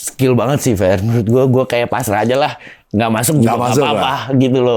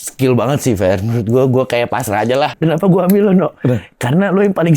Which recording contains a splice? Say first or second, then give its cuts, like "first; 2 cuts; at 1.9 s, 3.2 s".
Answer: second; 1 cut; at 2.6 s